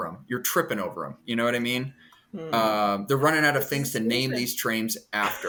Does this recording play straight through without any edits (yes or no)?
yes